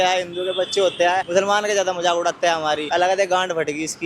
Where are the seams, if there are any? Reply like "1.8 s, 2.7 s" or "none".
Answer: 1.3 s, 2.8 s